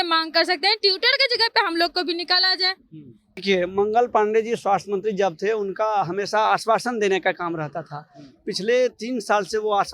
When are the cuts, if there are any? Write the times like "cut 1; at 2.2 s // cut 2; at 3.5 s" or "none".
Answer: cut 1; at 3.4 s